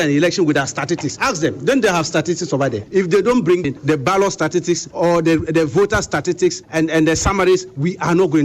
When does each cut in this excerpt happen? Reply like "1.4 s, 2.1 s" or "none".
1.2 s, 2.8 s, 3.6 s, 4.9 s, 6.6 s